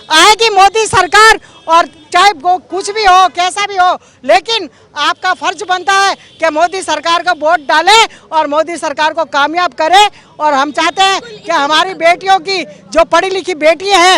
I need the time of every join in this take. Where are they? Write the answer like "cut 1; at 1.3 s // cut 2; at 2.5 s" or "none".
none

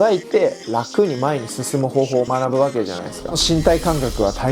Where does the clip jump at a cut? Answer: cut 1; at 3.4 s

